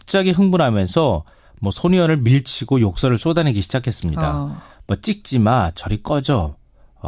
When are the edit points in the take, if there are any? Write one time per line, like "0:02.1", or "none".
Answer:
0:02.5